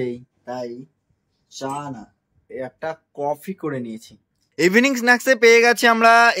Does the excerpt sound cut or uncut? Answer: cut